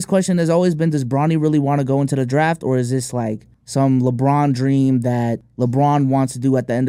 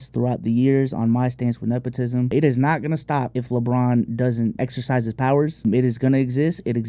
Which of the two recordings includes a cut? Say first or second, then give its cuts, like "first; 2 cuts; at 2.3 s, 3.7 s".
second; 4 cuts; at 2.3 s, 3.4 s, 4.5 s, 5.6 s